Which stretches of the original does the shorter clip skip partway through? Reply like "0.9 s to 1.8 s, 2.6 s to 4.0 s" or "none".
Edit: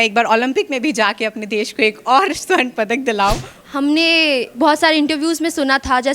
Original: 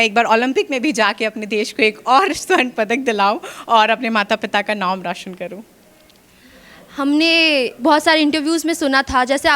3.5 s to 6.8 s